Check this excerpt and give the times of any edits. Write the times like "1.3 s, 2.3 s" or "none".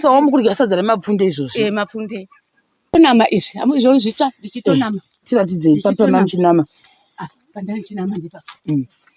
2.9 s